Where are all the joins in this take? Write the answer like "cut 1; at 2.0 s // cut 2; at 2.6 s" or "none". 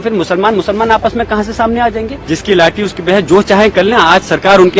cut 1; at 2.2 s